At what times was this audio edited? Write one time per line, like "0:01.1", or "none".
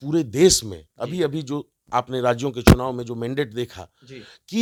none